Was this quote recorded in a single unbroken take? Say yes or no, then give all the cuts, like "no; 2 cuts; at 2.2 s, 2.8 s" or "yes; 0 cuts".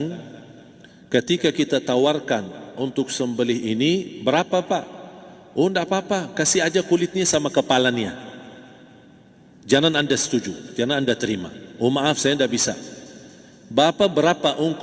yes; 0 cuts